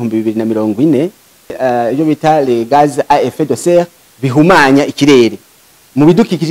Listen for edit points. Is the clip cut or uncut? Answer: cut